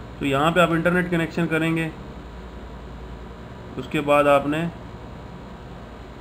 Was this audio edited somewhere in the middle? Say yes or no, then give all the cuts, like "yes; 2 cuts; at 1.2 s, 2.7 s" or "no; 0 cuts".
no; 0 cuts